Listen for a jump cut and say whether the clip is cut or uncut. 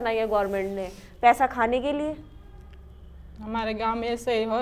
uncut